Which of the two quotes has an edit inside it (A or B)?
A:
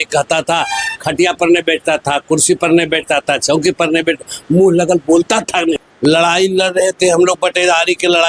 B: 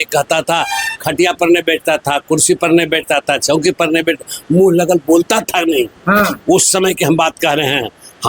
A